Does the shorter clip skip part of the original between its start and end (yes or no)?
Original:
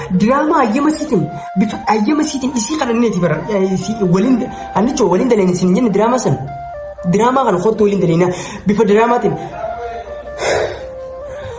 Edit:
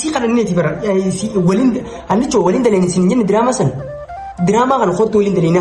no